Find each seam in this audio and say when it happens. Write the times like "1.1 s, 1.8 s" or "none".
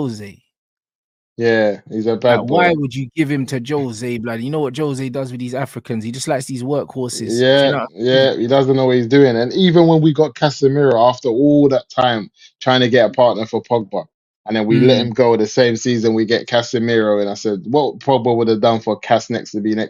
none